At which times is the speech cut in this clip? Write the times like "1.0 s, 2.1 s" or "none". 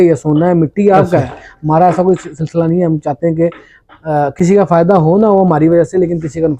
none